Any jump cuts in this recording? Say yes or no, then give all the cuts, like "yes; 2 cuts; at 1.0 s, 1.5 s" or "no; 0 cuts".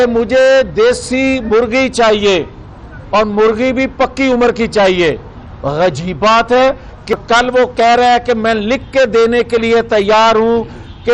yes; 1 cut; at 7.1 s